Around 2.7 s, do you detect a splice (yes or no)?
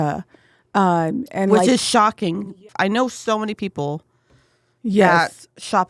yes